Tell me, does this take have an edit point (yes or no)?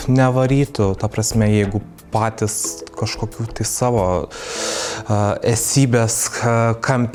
no